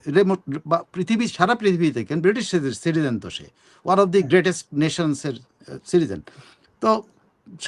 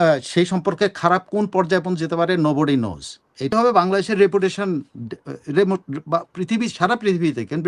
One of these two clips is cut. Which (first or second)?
second